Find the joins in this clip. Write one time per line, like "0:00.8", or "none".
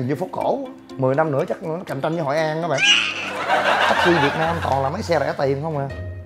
0:04.0

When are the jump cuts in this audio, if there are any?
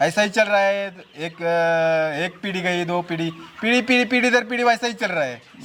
none

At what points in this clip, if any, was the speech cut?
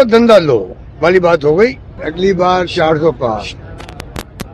0:02.0

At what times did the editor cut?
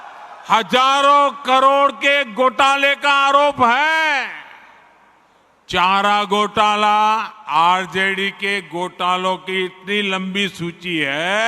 0:07.4

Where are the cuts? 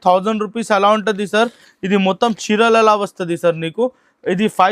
none

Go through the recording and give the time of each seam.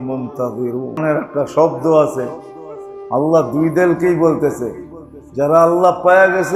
0:01.0

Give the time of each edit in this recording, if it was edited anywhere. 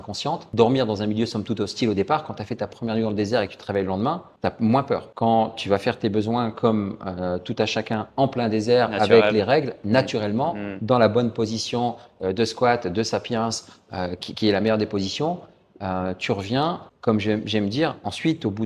none

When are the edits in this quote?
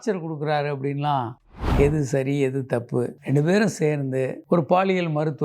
0:01.4
0:03.1

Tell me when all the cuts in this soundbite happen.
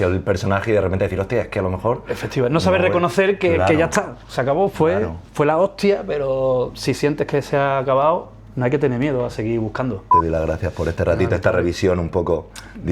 0:10.1

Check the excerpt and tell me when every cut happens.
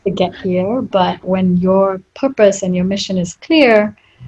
0:01.2

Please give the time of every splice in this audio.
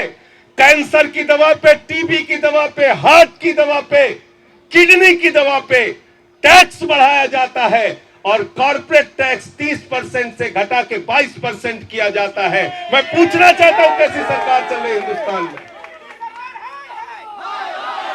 none

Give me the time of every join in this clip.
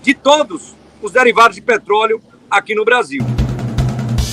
0:03.2

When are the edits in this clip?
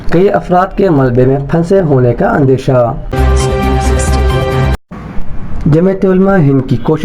0:03.2
0:04.8

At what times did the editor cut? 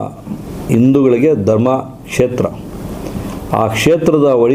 none

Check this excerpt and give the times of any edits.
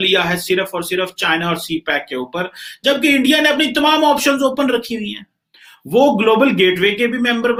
none

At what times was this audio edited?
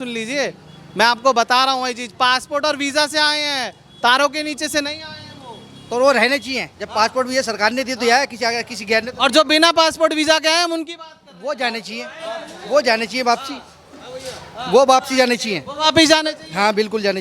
none

